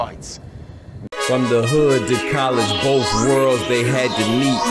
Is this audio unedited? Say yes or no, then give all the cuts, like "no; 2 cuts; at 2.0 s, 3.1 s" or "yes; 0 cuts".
no; 1 cut; at 0.9 s